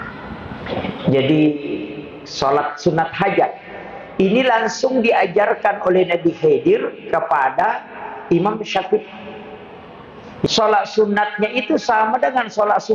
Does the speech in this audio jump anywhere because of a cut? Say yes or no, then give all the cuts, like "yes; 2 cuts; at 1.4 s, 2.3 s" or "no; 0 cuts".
yes; 1 cut; at 10.5 s